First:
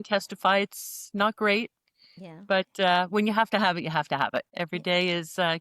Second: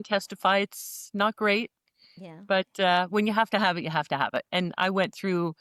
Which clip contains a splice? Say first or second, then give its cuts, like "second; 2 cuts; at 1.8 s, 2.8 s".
first; 1 cut; at 4.5 s